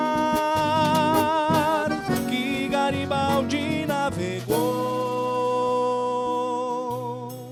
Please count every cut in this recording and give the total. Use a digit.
0